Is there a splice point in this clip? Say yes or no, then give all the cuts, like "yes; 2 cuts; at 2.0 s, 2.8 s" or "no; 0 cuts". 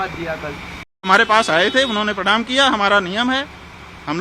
yes; 1 cut; at 1.0 s